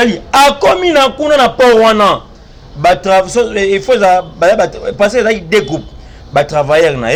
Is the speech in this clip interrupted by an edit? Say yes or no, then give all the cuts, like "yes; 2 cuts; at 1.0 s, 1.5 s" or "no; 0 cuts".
no; 0 cuts